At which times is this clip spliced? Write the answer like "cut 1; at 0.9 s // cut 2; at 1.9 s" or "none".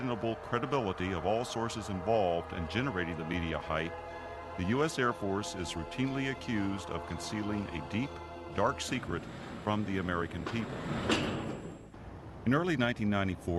cut 1; at 10.0 s